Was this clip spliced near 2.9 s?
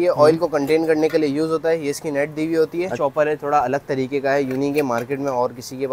yes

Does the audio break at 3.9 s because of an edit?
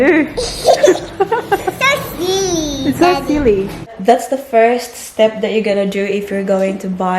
yes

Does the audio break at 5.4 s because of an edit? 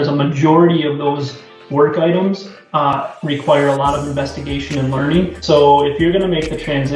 yes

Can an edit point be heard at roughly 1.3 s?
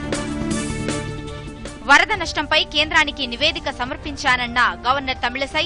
yes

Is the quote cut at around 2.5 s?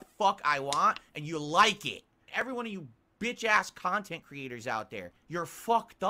yes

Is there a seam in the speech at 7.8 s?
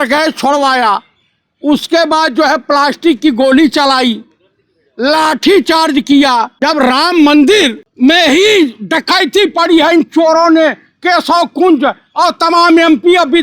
yes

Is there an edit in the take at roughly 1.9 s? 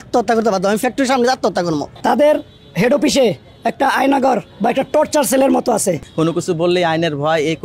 yes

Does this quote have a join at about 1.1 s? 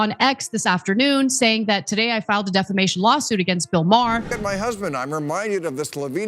no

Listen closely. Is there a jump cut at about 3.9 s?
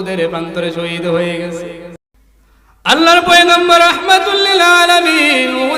no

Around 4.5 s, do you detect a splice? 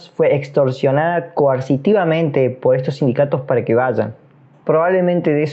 yes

